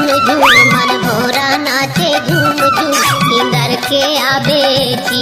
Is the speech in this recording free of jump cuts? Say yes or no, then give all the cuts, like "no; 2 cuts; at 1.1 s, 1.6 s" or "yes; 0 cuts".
yes; 0 cuts